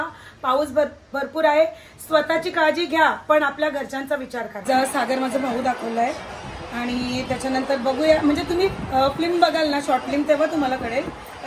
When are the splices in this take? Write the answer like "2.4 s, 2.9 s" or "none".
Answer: 4.6 s